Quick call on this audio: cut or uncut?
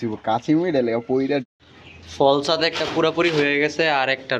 cut